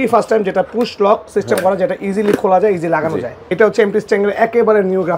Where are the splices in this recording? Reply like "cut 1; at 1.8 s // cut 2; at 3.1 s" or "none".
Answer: cut 1; at 3.5 s